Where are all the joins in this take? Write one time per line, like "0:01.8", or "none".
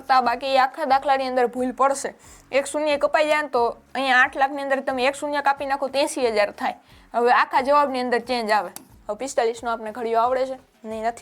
0:09.0